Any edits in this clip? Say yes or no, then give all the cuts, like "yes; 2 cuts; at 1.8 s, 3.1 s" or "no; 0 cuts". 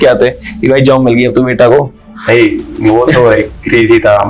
no; 0 cuts